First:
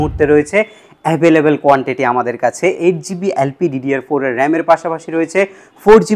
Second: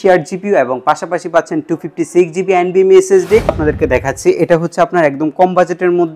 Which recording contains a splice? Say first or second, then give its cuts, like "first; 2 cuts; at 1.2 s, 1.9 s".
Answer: second; 1 cut; at 3.6 s